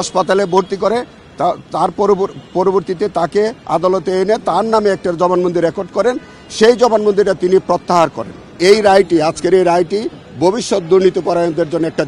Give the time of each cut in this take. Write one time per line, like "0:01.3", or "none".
0:08.6